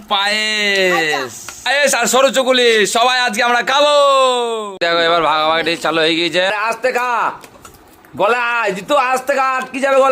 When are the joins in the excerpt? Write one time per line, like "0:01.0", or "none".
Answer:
0:06.5